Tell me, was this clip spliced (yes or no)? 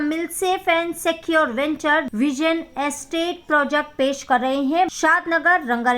yes